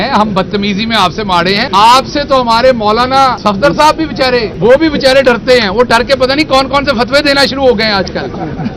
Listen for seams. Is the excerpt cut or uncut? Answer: cut